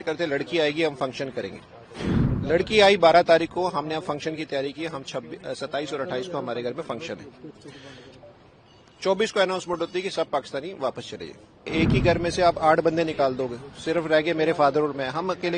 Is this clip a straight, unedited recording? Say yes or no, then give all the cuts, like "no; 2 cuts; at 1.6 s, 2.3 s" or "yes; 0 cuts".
no; 1 cut; at 11.7 s